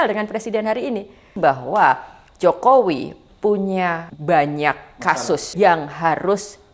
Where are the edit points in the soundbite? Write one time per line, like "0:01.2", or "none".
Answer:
0:01.2
0:04.1
0:05.5